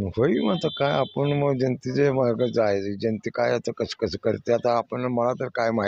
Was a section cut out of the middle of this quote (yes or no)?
no